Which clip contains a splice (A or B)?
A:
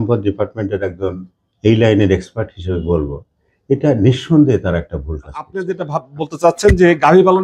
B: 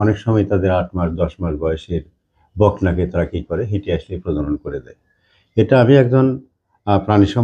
A